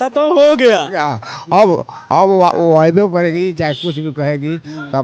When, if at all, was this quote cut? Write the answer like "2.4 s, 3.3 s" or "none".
none